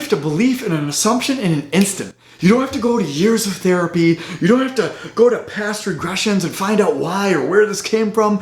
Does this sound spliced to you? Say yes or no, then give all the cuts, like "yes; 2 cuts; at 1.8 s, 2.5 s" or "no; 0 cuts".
no; 0 cuts